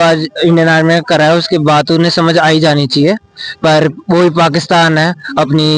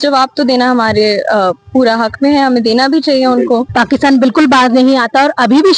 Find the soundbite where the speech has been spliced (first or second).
second